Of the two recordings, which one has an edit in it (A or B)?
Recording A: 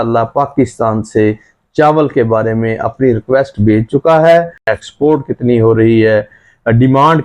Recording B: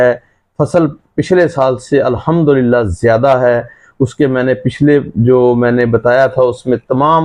A